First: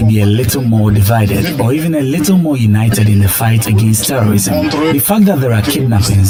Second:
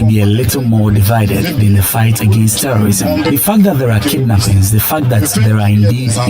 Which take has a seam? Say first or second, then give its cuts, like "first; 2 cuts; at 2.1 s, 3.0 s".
second; 2 cuts; at 1.6 s, 3.3 s